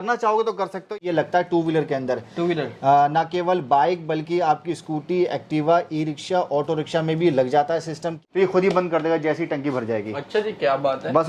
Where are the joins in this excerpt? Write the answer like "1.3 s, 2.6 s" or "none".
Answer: 1.0 s, 8.1 s